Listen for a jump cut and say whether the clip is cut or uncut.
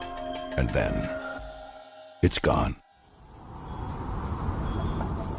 uncut